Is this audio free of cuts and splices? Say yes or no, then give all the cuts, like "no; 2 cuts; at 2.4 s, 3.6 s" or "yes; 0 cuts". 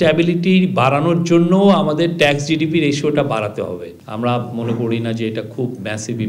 yes; 0 cuts